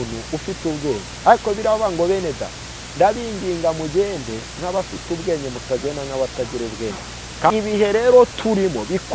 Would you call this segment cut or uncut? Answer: cut